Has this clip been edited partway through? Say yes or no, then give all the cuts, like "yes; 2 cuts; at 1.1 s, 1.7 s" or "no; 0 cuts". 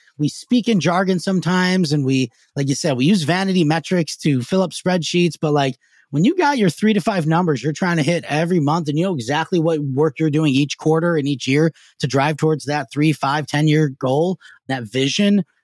no; 0 cuts